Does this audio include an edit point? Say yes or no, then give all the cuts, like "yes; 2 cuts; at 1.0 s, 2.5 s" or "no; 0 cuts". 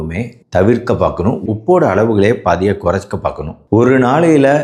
yes; 1 cut; at 3.6 s